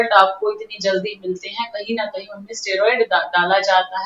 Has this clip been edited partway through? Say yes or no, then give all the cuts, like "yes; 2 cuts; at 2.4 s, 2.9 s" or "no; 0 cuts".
no; 0 cuts